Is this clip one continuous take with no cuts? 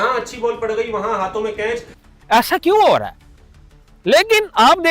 no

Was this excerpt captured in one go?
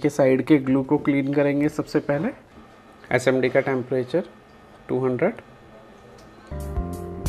yes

